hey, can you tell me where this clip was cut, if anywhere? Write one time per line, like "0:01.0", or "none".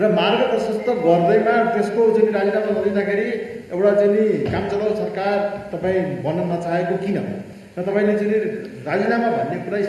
none